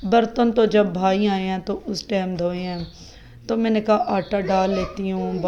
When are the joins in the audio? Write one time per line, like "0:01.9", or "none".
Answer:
none